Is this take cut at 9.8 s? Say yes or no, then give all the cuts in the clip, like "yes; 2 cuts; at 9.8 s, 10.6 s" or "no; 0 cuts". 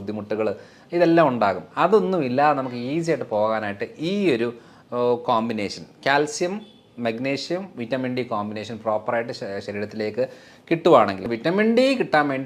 no; 1 cut; at 11.2 s